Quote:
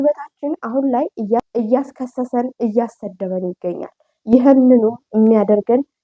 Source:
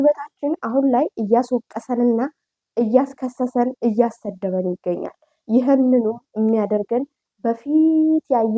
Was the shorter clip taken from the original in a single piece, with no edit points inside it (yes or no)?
no